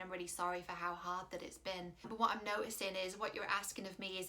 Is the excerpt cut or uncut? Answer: cut